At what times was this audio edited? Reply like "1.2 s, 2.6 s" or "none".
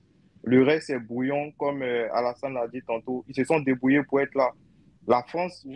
none